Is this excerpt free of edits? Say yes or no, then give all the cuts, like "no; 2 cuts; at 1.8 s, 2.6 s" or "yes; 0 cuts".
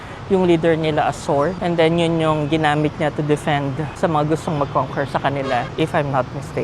no; 3 cuts; at 1.6 s, 3.9 s, 5.7 s